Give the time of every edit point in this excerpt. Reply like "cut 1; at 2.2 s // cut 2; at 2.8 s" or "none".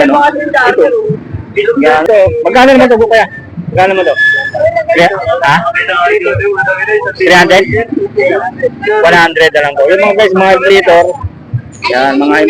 cut 1; at 2.0 s